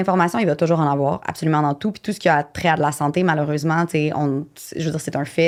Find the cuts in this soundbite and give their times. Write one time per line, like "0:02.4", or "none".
none